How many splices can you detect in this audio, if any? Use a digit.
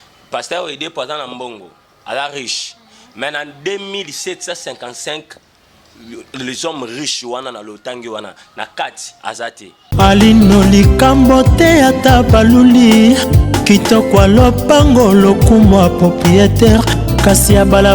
1